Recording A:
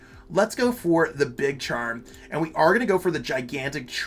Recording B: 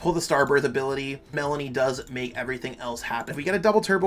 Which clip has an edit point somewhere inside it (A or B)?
B